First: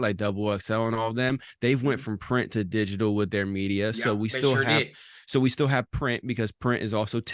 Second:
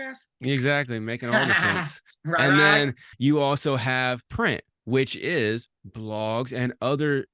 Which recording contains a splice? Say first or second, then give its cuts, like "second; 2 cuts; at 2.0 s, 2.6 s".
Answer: second; 2 cuts; at 3.1 s, 4.3 s